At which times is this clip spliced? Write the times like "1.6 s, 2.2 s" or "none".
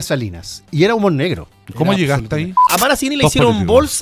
2.6 s